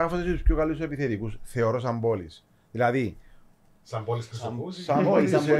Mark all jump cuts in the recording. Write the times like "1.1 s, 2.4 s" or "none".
none

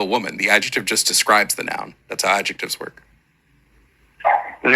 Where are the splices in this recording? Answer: 1.0 s

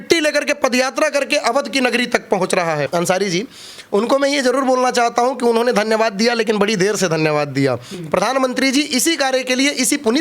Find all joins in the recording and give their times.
2.9 s, 7.9 s

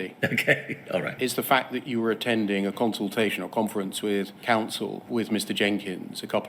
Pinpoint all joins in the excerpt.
1.1 s

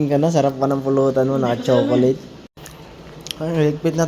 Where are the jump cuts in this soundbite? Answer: 2.6 s

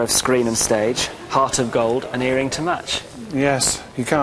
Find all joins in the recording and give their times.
none

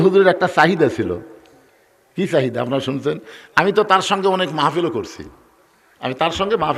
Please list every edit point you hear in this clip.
none

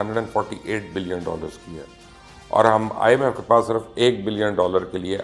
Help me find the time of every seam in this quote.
none

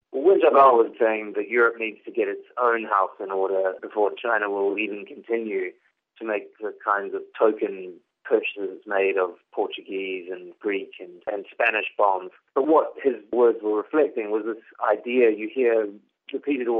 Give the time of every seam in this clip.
0.9 s, 11.3 s

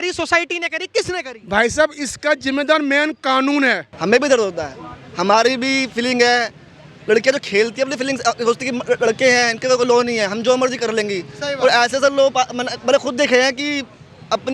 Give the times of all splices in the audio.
3.9 s

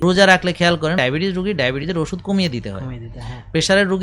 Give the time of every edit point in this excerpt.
1.0 s

